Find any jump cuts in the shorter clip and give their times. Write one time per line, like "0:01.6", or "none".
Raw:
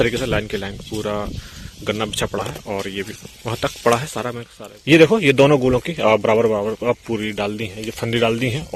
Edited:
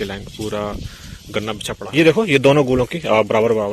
0:01.7